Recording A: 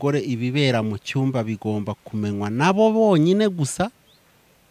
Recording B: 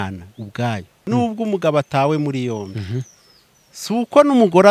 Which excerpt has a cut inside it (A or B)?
B